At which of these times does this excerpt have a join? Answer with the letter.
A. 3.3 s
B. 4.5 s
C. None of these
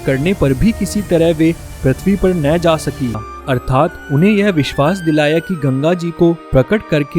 A